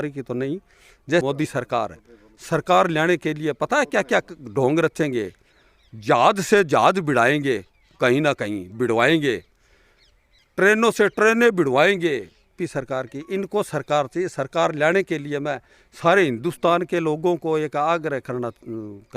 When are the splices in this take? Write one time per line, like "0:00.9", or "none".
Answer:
0:01.2
0:12.6